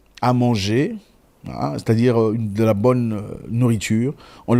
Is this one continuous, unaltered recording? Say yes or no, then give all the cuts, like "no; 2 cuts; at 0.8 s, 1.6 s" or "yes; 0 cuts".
yes; 0 cuts